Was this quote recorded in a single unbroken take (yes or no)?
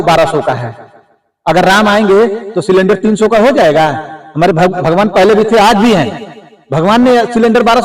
yes